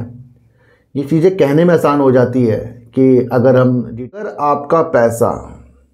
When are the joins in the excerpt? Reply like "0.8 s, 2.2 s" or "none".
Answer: 4.1 s